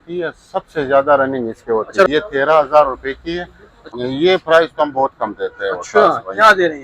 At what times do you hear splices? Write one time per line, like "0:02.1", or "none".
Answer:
0:02.1
0:03.8